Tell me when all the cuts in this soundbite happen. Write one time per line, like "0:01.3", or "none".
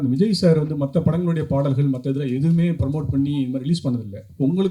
none

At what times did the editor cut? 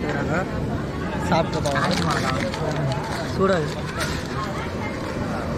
none

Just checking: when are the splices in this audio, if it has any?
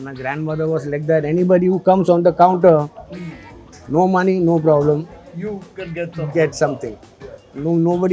none

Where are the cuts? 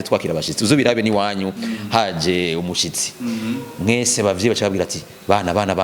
none

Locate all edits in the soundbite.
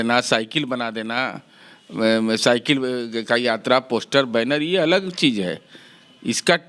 none

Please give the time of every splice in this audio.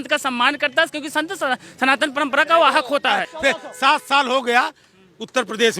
0:03.3

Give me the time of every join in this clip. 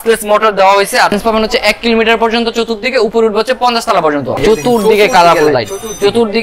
0:01.1
0:04.4

